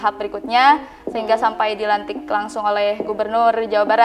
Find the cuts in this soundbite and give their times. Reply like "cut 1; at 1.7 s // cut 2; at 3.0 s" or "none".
none